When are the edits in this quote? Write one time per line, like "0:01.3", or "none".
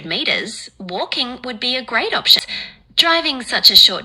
0:02.4